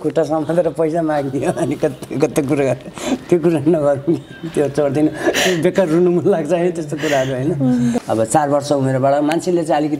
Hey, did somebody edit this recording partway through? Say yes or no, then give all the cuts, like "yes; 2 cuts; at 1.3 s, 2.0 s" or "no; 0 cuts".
no; 0 cuts